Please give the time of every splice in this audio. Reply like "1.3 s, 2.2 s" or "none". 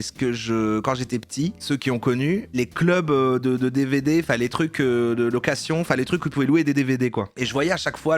1.6 s, 2.5 s